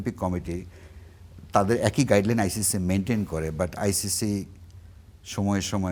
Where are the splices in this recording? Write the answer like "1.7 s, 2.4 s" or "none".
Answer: none